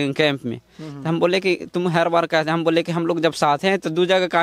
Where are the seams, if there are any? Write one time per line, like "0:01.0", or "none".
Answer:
none